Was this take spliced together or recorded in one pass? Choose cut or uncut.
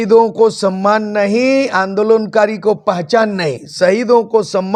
uncut